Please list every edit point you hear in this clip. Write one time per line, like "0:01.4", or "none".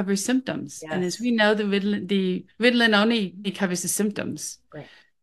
0:02.5
0:03.5